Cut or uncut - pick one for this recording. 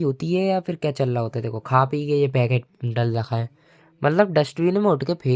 uncut